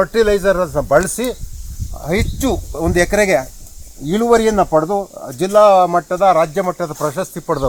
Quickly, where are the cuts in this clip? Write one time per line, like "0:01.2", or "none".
none